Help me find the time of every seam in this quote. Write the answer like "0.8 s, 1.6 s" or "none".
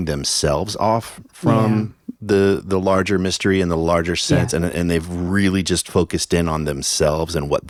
none

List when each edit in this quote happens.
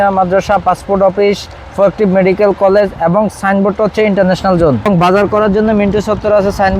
4.9 s

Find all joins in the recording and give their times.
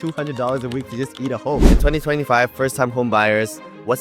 1.7 s

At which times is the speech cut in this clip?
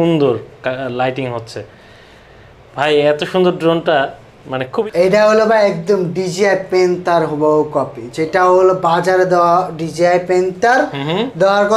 4.7 s

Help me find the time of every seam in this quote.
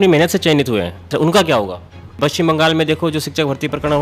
1.1 s, 2.2 s

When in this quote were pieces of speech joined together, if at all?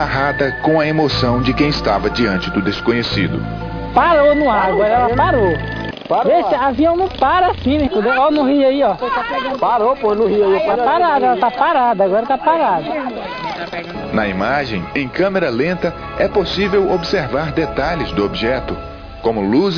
18.8 s

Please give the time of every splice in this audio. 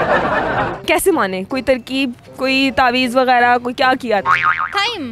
none

